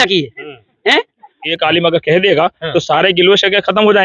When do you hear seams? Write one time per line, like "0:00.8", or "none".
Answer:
0:01.5